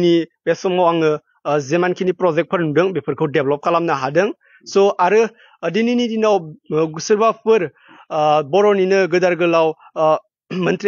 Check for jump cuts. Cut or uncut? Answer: uncut